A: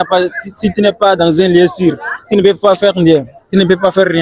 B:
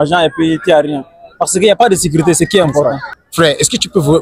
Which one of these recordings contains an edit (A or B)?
B